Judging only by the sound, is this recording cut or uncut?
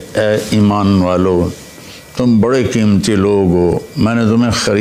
uncut